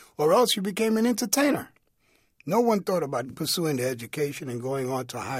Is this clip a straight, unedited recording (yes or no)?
no